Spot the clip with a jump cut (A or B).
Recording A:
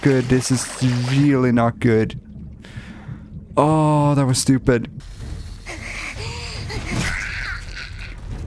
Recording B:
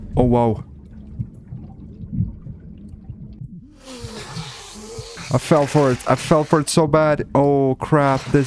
A